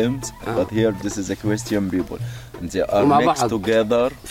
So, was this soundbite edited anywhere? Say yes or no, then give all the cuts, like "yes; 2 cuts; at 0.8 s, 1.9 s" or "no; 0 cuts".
no; 0 cuts